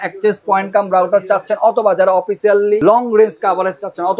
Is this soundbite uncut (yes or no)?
no